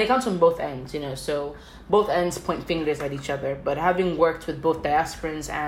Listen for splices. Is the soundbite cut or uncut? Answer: uncut